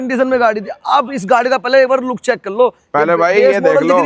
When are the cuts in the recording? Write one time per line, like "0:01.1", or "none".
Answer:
none